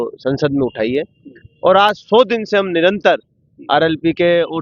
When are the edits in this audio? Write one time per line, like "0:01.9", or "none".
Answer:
none